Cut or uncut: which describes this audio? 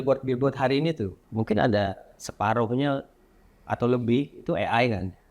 cut